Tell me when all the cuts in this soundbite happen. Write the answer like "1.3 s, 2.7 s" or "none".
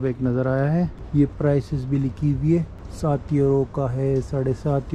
1.0 s, 2.8 s